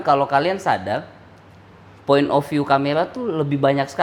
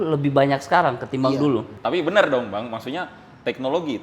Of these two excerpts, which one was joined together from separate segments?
second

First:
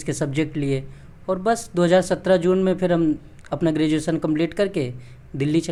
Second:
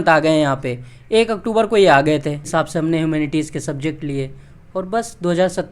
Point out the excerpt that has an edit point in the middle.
second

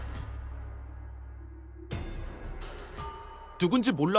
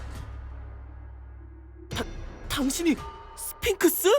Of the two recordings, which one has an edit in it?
second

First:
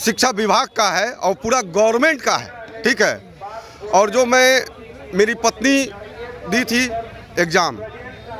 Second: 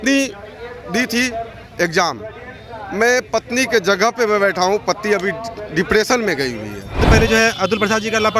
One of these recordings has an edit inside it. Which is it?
second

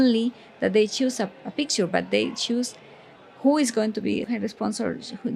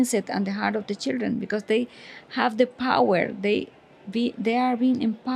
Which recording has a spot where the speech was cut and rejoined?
first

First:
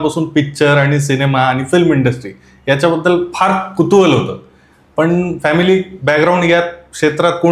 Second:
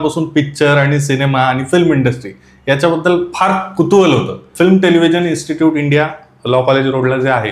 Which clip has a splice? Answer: second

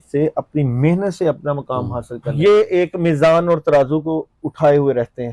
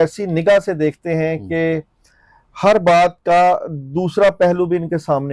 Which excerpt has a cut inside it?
first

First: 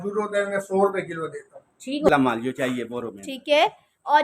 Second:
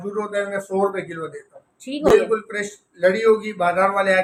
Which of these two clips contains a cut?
first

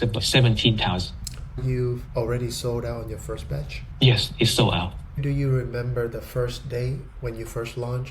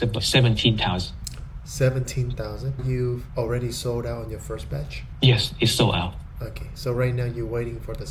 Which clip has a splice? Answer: first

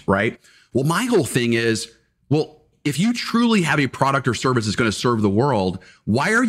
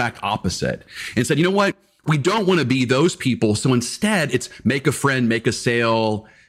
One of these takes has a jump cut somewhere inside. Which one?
first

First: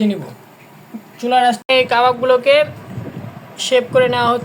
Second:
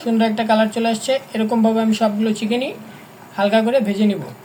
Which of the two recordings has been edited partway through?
first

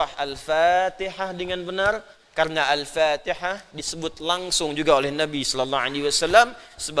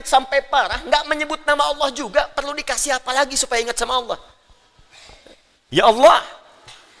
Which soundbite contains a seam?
second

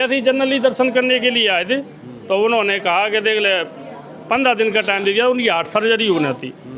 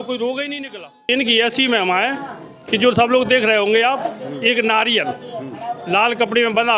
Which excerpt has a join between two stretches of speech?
second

